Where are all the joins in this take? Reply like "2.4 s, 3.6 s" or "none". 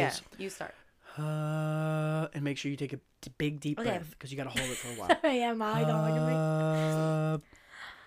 none